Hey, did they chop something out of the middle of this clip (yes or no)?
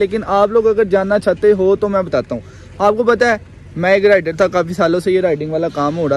no